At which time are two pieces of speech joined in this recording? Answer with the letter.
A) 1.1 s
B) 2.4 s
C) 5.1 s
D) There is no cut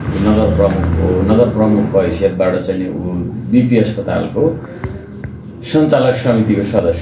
D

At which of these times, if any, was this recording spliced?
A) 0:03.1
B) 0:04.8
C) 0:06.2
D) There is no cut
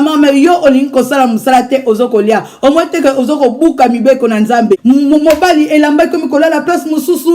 B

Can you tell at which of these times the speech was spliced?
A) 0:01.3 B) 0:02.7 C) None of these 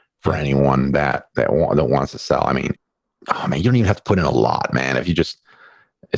B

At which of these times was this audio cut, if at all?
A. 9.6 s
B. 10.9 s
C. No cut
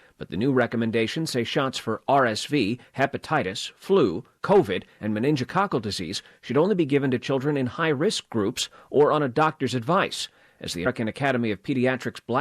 B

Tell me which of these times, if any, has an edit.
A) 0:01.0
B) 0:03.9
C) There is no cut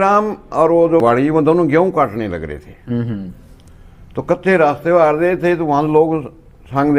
A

